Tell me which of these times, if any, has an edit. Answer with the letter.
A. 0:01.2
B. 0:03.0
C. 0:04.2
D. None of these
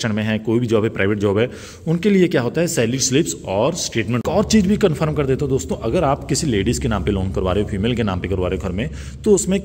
C